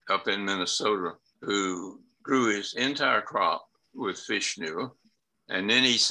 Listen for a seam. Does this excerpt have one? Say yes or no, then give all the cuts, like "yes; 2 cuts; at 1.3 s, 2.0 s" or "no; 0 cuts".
no; 0 cuts